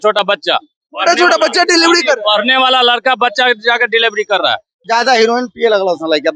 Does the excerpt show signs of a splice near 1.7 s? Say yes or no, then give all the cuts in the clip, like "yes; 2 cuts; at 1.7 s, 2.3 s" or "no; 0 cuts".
no; 1 cut; at 4.8 s